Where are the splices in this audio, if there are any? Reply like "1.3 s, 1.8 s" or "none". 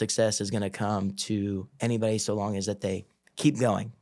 none